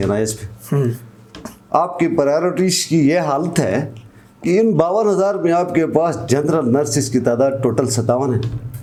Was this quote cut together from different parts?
no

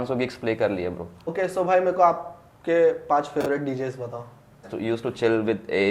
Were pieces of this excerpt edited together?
yes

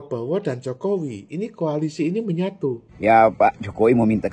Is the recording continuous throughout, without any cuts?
no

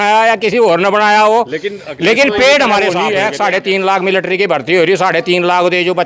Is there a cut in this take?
yes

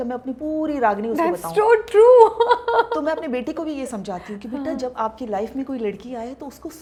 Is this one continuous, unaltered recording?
yes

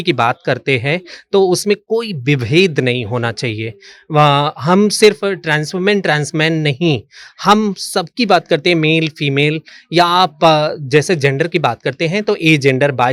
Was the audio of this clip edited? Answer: no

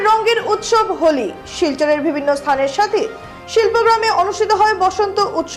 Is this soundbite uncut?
yes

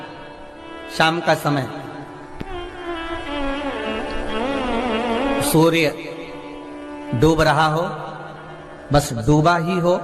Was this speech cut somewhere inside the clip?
no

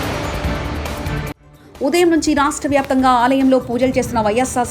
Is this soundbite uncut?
no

